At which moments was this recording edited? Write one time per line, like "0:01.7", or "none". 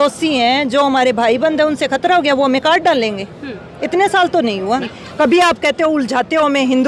0:04.9